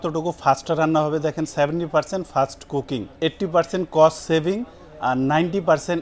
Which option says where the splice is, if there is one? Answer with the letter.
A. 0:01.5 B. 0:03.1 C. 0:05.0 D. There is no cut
B